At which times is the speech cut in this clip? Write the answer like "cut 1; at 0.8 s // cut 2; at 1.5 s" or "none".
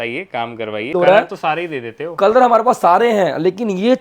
cut 1; at 0.9 s